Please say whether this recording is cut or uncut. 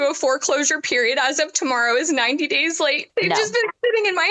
cut